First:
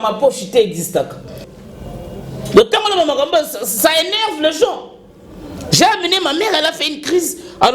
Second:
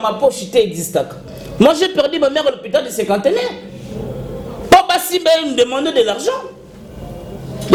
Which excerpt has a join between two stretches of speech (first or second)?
first